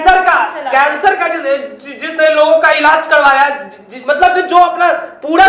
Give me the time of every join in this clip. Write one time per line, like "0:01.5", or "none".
none